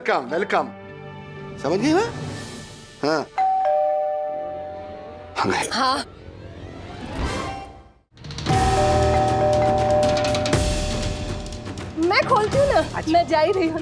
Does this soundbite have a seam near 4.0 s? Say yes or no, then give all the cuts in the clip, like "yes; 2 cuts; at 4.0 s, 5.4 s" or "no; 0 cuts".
no; 1 cut; at 8.4 s